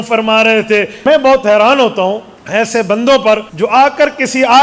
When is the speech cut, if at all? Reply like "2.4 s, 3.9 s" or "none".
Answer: 1.1 s, 2.3 s, 3.5 s